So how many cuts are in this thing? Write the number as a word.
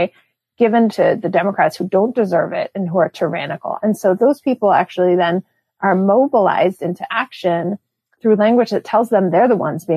one